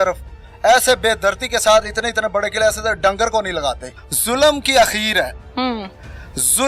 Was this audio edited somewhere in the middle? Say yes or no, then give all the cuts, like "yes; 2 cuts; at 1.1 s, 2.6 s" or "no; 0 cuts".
yes; 1 cut; at 3.9 s